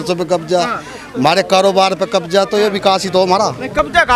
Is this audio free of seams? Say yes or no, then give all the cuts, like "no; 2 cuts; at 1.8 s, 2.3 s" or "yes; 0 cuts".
yes; 0 cuts